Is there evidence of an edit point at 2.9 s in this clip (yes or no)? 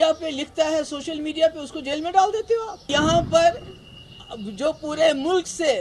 yes